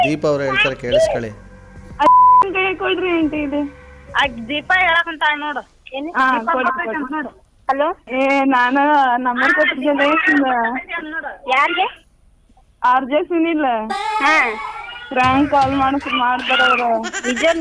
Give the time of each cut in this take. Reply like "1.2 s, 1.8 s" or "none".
8.0 s